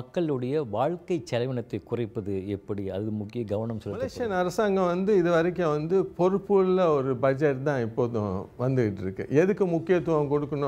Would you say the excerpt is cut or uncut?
cut